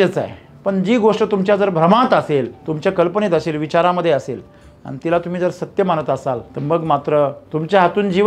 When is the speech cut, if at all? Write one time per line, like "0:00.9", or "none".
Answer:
0:02.6
0:06.5
0:07.4